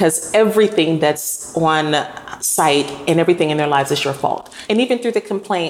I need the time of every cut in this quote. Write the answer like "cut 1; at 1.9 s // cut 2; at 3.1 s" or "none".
cut 1; at 4.5 s